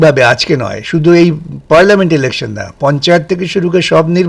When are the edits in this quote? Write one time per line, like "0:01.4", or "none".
none